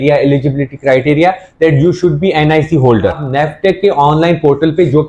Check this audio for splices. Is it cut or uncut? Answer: cut